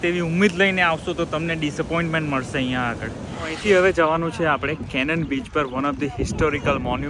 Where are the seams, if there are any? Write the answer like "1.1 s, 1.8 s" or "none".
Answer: 3.5 s

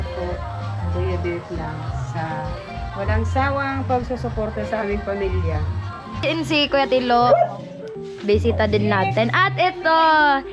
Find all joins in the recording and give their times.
6.2 s

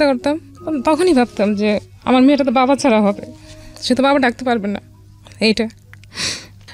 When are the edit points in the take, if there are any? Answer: none

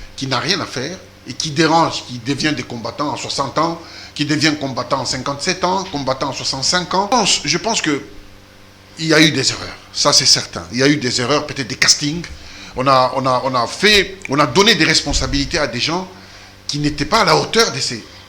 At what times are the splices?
7.1 s

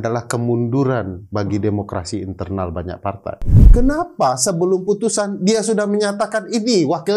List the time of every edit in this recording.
3.5 s

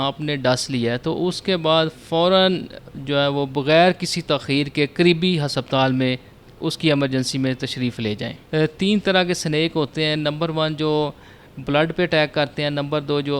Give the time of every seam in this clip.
8.3 s

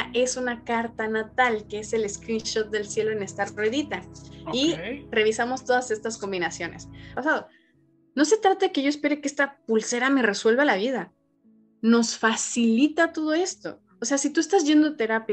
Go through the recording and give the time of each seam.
7.1 s

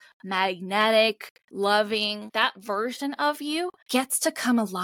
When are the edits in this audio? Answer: 1.4 s, 2.3 s, 3.8 s

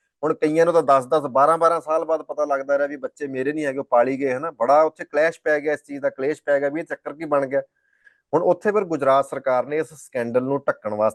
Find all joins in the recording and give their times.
none

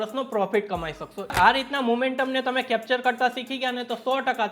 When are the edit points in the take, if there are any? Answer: 1.3 s

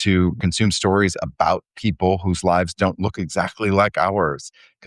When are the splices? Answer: none

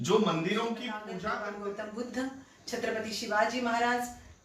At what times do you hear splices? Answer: 1.1 s

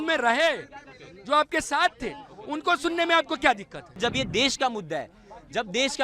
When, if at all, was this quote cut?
4.0 s

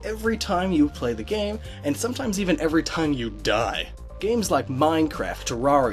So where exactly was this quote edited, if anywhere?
none

